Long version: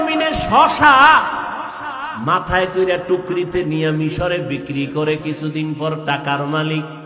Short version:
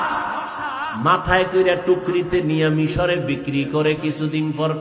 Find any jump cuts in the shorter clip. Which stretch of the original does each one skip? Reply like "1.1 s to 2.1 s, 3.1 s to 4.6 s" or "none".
none